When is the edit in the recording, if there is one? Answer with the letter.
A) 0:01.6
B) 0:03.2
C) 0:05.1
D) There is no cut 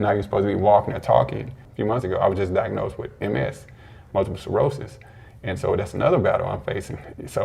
A